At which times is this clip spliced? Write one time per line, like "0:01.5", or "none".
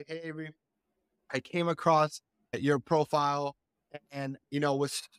none

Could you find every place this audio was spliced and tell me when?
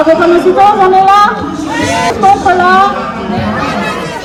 none

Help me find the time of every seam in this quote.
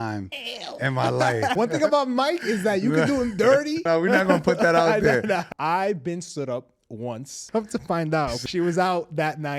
0:01.6
0:03.8
0:05.5
0:07.3
0:08.4

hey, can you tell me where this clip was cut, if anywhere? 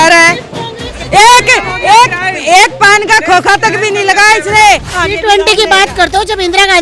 0:04.9

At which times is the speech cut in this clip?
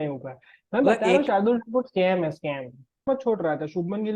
0:03.0

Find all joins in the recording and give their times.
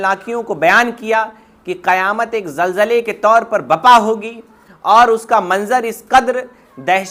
none

